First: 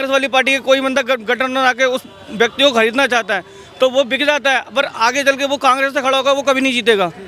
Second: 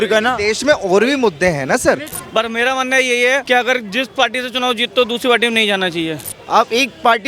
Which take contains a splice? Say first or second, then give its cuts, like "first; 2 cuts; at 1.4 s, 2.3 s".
second; 3 cuts; at 2.2 s, 3.4 s, 6.3 s